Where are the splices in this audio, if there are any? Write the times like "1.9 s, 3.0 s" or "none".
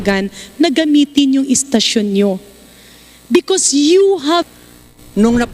4.5 s